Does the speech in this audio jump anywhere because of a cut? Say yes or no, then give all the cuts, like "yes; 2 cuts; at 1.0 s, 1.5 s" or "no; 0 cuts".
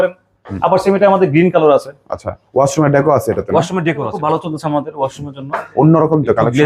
yes; 1 cut; at 4.1 s